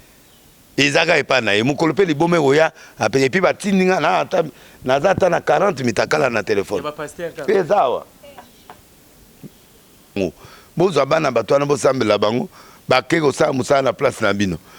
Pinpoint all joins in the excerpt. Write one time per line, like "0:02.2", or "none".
0:10.2